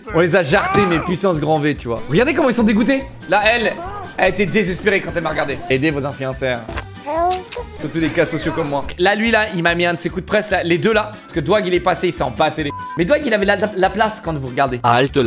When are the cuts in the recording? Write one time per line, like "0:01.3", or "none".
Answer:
0:03.1
0:08.9